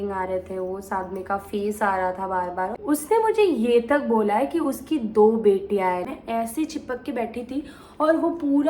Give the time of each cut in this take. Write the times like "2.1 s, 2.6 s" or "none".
2.7 s, 6.0 s

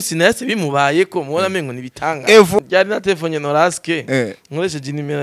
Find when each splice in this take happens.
2.6 s

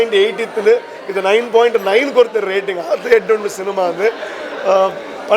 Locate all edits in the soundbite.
none

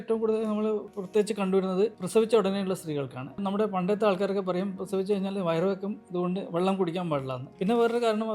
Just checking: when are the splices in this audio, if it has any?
1.0 s, 2.0 s, 3.4 s, 7.5 s

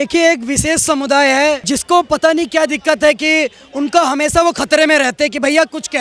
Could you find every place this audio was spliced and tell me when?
1.6 s

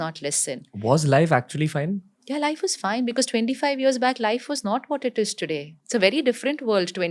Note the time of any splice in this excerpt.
5.7 s

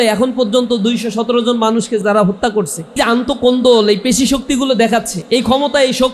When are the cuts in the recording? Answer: 2.0 s, 3.0 s, 5.1 s

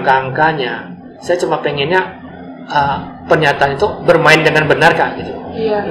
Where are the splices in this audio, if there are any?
none

